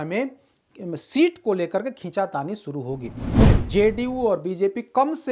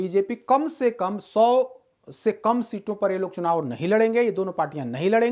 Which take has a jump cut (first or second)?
first